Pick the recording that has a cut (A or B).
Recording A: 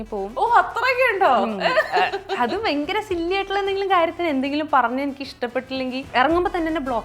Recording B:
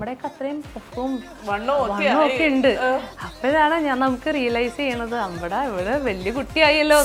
A